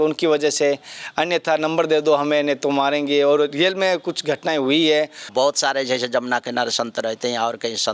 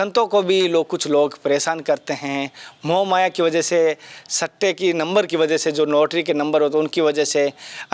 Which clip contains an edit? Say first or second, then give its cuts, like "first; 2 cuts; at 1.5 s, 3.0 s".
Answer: first; 1 cut; at 5.3 s